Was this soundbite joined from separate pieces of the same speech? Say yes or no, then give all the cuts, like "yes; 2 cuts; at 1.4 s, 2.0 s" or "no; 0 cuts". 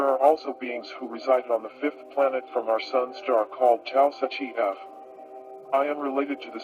yes; 1 cut; at 2.5 s